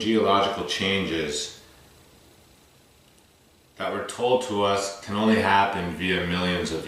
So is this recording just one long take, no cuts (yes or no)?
yes